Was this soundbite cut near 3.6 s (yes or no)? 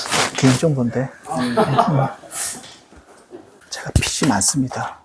yes